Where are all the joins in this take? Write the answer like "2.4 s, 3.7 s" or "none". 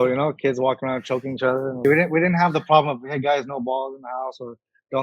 1.8 s